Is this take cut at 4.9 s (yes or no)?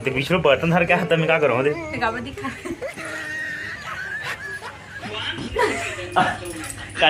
yes